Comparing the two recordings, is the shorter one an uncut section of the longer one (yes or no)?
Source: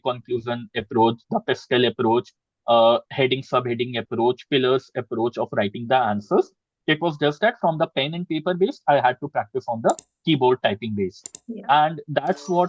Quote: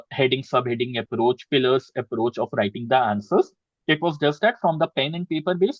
yes